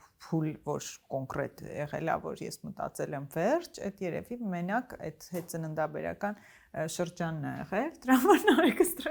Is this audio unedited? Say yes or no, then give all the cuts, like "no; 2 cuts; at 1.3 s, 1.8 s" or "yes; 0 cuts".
yes; 0 cuts